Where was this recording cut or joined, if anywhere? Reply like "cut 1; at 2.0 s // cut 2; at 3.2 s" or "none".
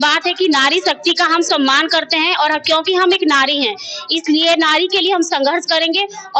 none